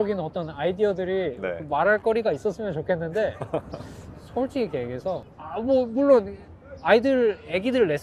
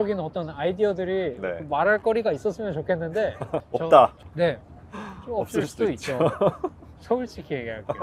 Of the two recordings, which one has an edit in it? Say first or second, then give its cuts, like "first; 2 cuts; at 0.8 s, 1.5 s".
second; 2 cuts; at 3.7 s, 4.2 s